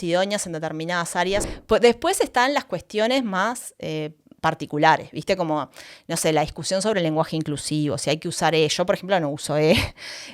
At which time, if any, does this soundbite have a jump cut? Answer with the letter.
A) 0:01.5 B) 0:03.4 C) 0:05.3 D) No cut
A